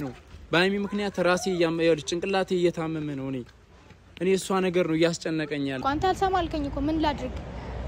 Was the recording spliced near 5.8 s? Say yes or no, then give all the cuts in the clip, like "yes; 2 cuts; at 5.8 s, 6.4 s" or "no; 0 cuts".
yes; 1 cut; at 5.8 s